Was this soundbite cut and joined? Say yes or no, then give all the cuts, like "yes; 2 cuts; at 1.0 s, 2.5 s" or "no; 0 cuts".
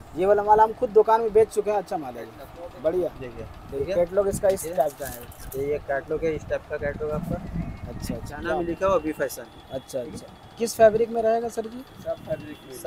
yes; 1 cut; at 8.5 s